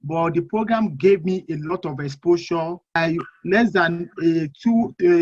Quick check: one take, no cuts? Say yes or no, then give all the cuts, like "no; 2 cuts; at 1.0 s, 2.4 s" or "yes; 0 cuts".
no; 1 cut; at 3.0 s